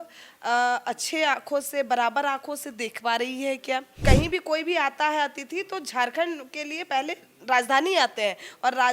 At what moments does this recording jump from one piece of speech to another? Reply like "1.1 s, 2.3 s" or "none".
3.9 s